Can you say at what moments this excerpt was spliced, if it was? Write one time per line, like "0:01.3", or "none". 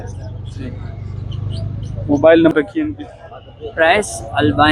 0:02.5